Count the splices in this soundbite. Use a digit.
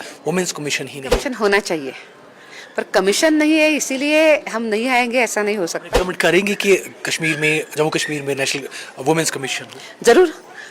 2